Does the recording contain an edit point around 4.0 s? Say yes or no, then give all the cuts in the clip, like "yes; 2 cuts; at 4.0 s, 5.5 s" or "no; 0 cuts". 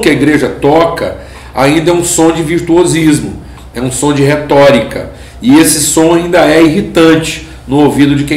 no; 0 cuts